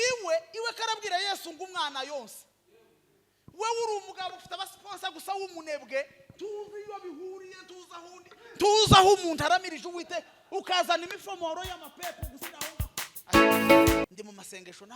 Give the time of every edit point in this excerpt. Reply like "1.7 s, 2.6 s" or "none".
14.0 s